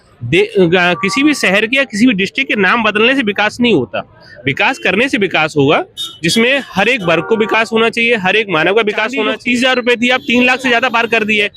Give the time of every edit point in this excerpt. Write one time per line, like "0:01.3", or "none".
0:09.3